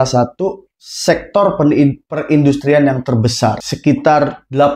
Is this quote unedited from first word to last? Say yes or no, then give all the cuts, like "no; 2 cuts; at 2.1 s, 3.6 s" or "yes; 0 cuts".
no; 1 cut; at 3.6 s